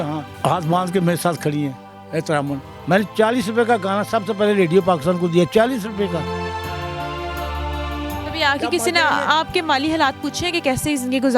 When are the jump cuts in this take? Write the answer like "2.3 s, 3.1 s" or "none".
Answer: 2.6 s, 8.2 s